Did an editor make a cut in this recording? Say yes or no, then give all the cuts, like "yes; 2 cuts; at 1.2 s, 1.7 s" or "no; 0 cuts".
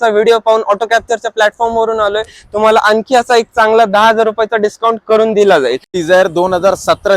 yes; 1 cut; at 5.7 s